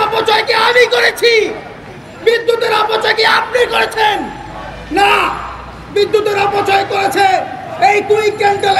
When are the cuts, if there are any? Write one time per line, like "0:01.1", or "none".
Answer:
none